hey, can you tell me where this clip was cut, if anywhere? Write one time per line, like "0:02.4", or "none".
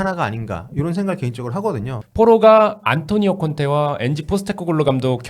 0:02.0